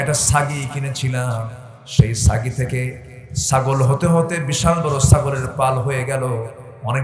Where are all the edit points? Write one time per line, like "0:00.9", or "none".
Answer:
none